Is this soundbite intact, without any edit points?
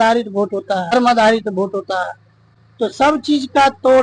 no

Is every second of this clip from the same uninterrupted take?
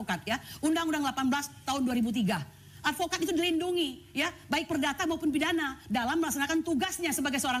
yes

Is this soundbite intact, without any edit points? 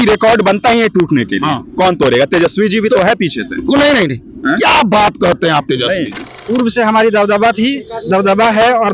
no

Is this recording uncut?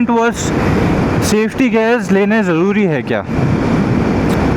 yes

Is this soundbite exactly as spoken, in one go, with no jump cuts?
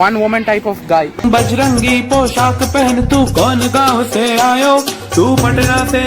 no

